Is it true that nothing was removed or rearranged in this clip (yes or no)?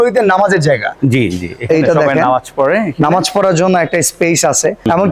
yes